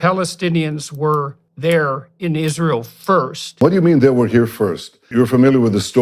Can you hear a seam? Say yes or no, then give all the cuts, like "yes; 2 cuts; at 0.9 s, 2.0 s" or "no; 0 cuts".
yes; 3 cuts; at 1.4 s, 3.6 s, 5.0 s